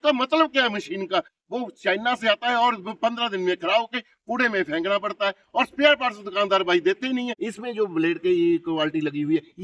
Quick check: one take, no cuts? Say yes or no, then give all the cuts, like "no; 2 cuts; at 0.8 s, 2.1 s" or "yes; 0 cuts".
no; 1 cut; at 7.4 s